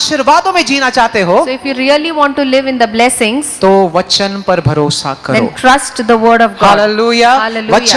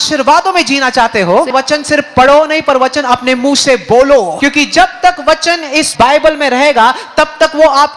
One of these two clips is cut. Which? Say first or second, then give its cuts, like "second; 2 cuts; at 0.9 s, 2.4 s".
second; 3 cuts; at 1.5 s, 4.3 s, 5.9 s